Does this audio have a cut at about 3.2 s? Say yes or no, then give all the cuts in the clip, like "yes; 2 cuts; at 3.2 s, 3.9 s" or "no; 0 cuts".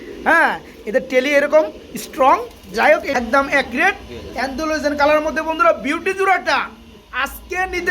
yes; 1 cut; at 3.2 s